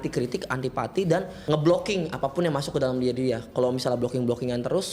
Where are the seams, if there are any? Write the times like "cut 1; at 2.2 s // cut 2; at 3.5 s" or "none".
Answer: cut 1; at 1.3 s